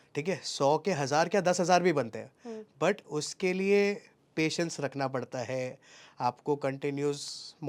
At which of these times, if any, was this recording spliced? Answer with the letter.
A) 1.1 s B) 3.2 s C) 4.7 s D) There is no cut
D